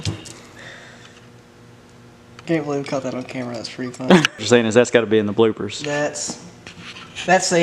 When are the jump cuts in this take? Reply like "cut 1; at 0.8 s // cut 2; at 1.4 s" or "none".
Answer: cut 1; at 2.5 s // cut 2; at 4.4 s